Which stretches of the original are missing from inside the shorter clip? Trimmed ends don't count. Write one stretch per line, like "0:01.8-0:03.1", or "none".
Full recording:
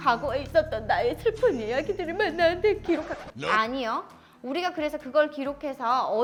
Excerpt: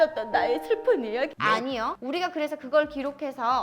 0:02.0-0:03.9